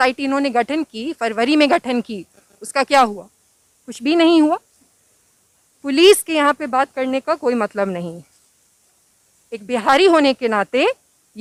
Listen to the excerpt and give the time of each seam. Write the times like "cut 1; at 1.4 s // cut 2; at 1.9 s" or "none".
none